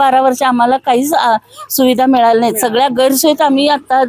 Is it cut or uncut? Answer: uncut